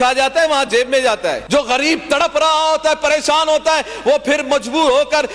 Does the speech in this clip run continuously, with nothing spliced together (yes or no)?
no